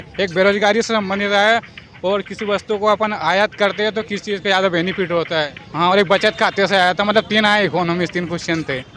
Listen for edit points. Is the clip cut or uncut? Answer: cut